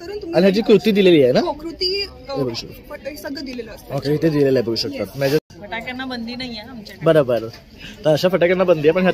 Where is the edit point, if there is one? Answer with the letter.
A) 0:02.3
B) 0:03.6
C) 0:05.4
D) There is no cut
C